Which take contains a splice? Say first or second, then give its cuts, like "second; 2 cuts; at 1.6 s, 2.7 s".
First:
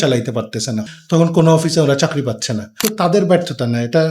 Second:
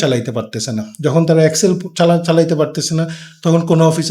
first; 2 cuts; at 0.9 s, 2.7 s